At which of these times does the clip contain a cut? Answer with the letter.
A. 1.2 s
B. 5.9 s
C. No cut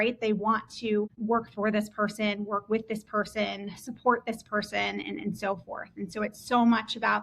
A